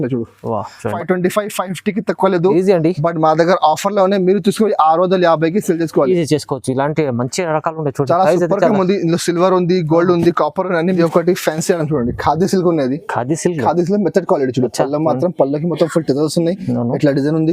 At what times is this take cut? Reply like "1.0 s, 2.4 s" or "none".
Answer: 0.9 s, 11.0 s